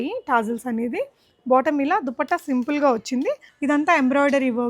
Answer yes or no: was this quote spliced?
yes